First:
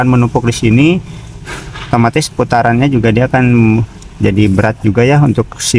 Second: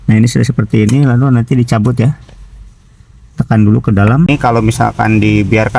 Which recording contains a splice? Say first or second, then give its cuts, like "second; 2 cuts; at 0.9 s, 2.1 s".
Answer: second; 1 cut; at 4.3 s